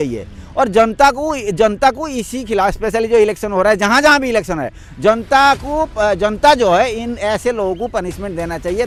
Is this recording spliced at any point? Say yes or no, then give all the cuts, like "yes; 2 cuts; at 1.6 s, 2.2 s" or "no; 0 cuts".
no; 0 cuts